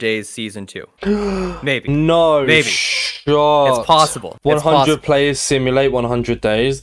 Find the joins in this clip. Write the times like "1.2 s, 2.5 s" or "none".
none